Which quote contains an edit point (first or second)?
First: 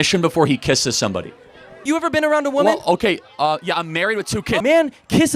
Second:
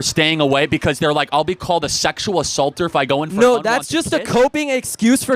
first